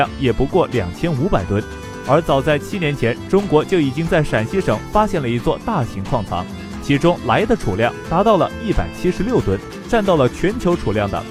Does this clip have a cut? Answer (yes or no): no